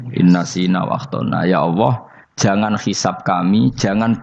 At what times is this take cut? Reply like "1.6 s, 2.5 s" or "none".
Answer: none

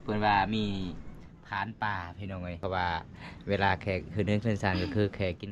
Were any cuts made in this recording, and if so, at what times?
2.6 s

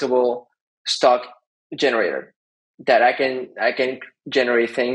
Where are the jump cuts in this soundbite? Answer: none

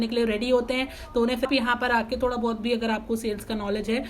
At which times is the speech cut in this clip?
1.5 s

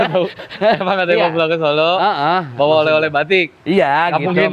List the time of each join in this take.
none

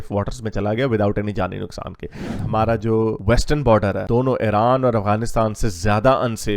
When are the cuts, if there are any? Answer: 2.3 s

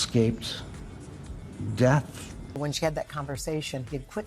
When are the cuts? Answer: 2.5 s

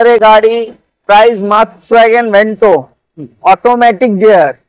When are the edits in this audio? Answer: 1.8 s

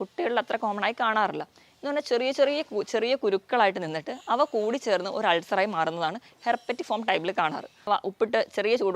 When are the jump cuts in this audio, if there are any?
7.9 s

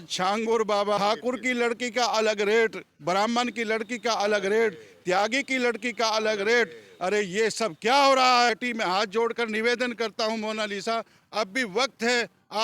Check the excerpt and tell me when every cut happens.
1.0 s, 8.5 s

